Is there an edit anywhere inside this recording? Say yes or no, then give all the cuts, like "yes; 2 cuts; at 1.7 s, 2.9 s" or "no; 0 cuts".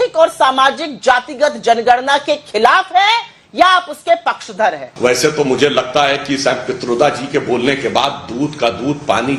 yes; 1 cut; at 4.9 s